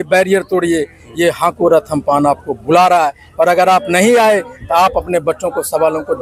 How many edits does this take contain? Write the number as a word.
zero